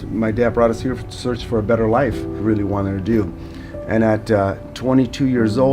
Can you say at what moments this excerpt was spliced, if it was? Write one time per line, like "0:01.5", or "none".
0:02.4